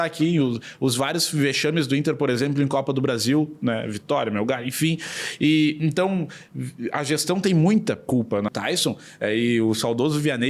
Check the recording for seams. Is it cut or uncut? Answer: cut